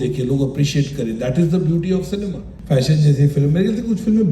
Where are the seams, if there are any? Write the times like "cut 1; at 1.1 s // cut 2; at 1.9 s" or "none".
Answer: cut 1; at 2.5 s